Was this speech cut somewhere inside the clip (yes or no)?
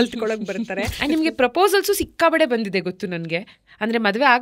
yes